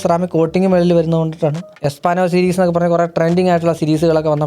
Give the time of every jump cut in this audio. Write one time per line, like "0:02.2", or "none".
0:01.8